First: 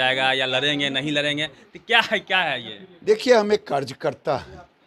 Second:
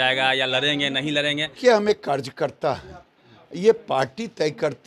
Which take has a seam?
second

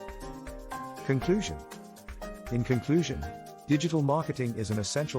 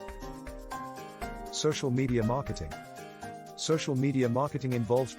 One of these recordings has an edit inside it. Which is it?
second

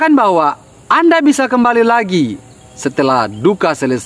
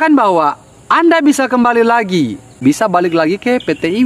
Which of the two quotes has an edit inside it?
second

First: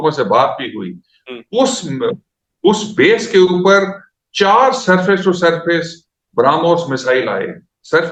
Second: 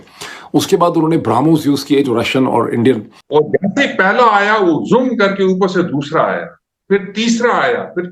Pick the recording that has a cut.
second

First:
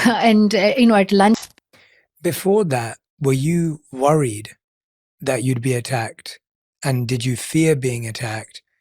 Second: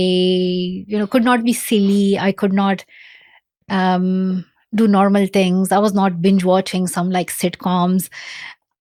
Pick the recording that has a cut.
first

